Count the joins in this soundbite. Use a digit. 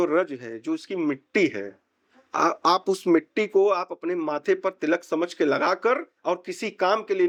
0